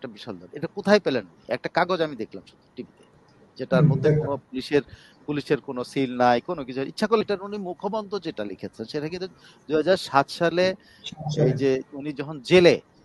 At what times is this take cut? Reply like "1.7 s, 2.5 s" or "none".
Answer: 7.2 s